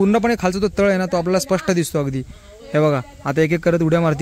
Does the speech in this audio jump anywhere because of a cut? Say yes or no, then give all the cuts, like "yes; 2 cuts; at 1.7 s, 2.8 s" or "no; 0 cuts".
no; 0 cuts